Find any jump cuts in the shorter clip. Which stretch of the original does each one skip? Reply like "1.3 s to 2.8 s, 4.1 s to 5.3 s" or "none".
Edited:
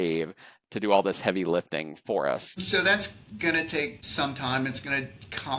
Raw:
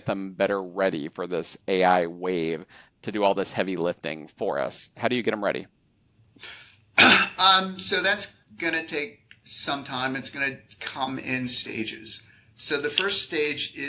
4.9 s to 7.8 s, 9.2 s to 9.5 s

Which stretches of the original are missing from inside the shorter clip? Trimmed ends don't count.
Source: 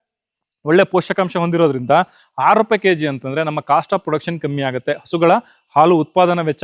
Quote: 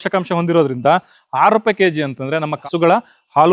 3.6 s to 5.0 s

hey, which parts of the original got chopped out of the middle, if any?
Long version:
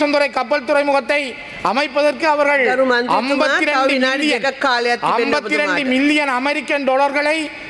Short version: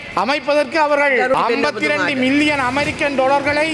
2.8 s to 5.0 s

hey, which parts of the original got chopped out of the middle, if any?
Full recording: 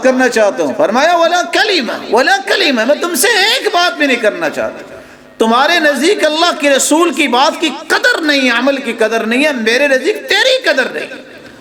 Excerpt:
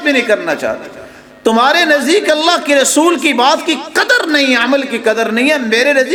none

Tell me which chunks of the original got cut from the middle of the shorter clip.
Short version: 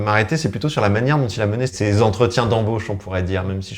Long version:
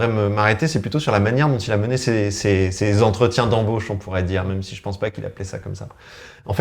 2.0 s to 2.7 s

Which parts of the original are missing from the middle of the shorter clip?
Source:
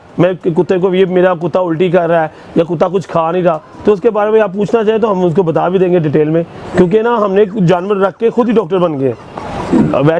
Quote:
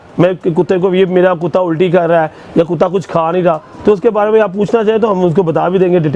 none

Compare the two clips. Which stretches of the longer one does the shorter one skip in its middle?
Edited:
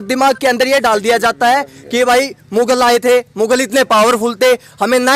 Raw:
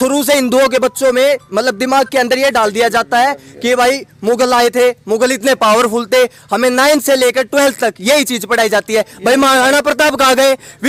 none

